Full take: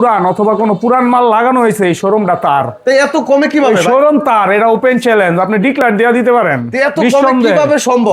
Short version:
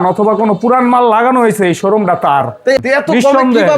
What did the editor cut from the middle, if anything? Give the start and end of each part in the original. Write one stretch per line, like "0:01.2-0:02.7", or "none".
0:03.0-0:06.7

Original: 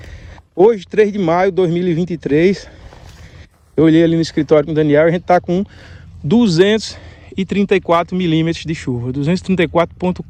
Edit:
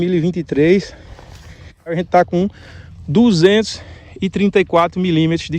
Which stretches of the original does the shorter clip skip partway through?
0:03.7-0:05.1

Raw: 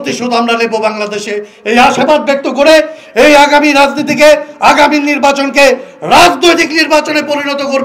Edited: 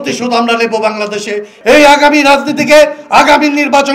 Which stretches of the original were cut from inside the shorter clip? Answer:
0:01.5-0:03.0

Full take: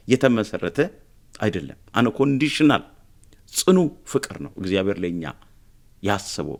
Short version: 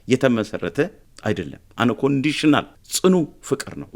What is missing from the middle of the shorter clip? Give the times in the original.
0:01.1-0:01.2
0:03.0-0:03.4

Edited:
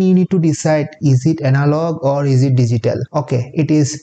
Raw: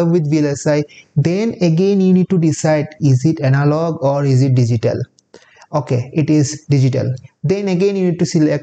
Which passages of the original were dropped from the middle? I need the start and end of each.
0:05.0-0:05.6

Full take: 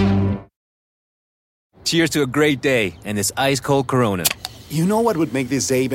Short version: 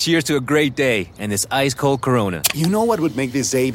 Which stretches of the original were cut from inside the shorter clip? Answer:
0:04.3-0:04.6

